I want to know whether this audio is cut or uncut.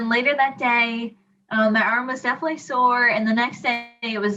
uncut